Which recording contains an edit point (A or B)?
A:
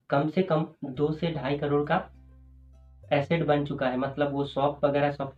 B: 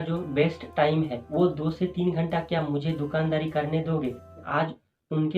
B